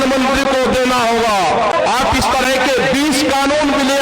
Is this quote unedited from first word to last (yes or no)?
no